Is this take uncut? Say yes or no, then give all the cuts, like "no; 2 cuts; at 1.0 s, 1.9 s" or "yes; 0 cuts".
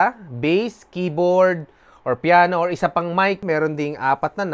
no; 1 cut; at 3.4 s